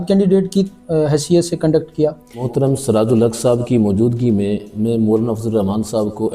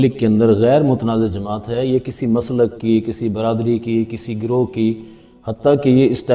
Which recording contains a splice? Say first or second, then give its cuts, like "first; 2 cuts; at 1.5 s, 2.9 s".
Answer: first; 1 cut; at 2.5 s